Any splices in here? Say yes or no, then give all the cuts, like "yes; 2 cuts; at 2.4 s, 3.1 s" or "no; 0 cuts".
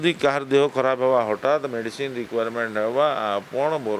no; 0 cuts